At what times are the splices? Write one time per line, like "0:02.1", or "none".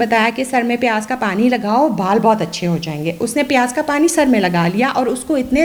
none